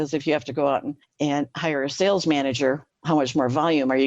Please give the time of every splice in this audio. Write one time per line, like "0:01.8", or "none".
0:01.0
0:02.9